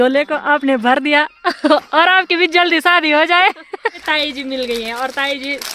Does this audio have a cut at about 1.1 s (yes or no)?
no